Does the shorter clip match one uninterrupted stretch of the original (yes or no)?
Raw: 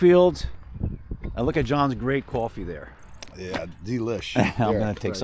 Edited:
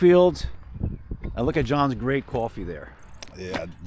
yes